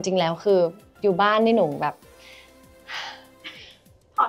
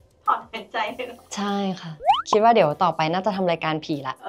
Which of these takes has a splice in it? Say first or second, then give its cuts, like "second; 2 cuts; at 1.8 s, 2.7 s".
second; 1 cut; at 2.1 s